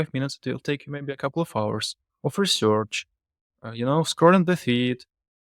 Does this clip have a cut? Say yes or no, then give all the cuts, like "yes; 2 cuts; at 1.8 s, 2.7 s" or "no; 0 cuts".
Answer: no; 0 cuts